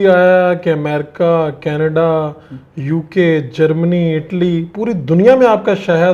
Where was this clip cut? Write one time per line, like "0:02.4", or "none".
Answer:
none